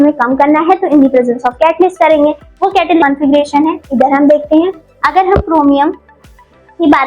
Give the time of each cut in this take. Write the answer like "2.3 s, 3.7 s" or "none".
3.0 s

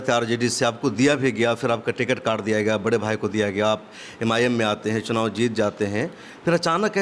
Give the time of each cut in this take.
none

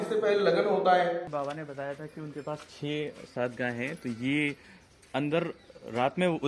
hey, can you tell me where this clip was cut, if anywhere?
1.3 s

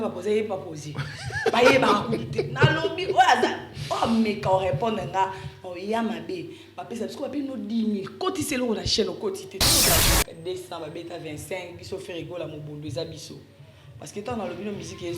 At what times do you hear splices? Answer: 9.9 s

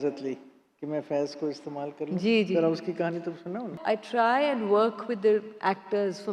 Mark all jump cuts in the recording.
3.7 s

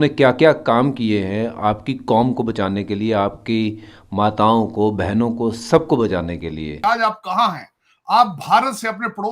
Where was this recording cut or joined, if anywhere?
6.7 s

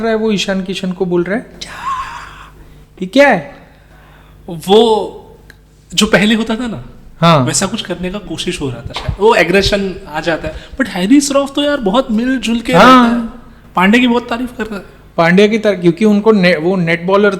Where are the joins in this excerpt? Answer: none

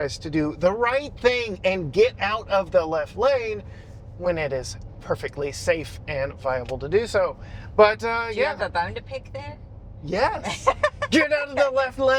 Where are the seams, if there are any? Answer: none

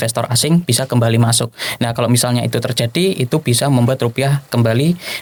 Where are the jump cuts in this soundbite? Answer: none

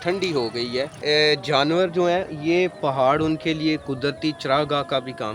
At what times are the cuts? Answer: 1.0 s

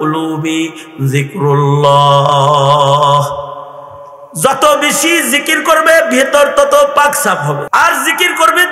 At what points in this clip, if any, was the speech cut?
7.7 s

